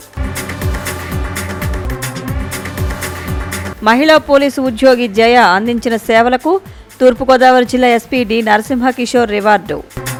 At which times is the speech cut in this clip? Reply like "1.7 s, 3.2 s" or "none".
none